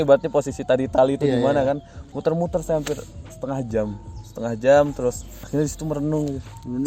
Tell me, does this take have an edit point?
no; 0 cuts

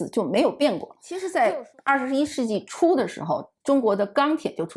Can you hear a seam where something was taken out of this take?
yes; 1 cut; at 1.2 s

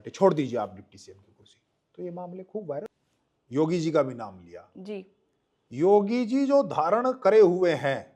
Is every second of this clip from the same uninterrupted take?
no; 1 cut; at 2.9 s

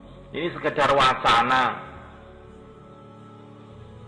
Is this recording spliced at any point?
yes; 1 cut; at 2.2 s

